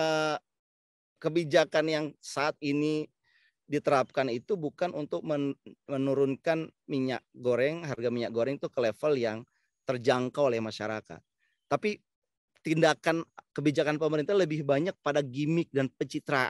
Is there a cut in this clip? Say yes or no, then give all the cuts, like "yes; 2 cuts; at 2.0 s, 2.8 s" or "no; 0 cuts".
no; 0 cuts